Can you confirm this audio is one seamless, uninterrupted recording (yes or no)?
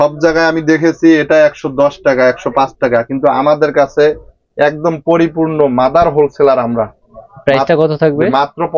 yes